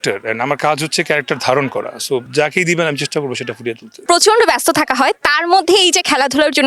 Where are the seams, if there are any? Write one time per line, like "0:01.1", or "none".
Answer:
none